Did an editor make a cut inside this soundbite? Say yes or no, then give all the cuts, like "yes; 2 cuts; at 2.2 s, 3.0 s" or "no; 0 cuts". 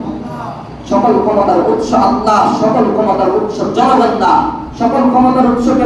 no; 0 cuts